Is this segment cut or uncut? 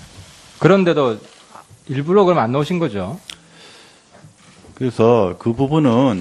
uncut